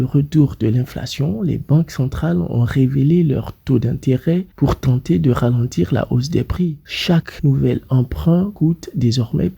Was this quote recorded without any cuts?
no; 1 cut; at 6.8 s

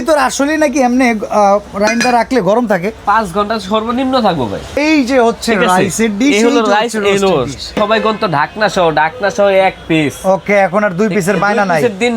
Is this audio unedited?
no; 2 cuts; at 4.8 s, 7.7 s

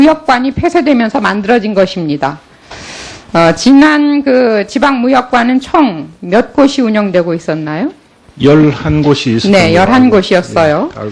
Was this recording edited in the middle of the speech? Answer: yes; 1 cut; at 3.7 s

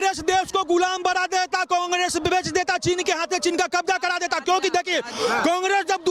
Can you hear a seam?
no; 0 cuts

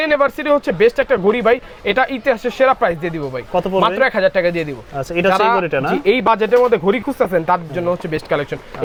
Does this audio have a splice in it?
no; 0 cuts

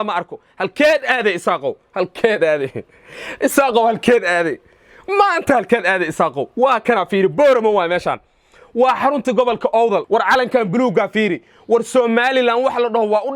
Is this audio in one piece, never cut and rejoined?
no; 1 cut; at 10.0 s

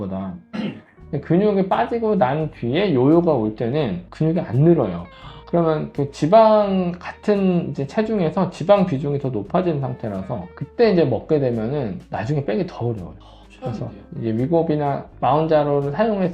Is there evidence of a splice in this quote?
no; 0 cuts

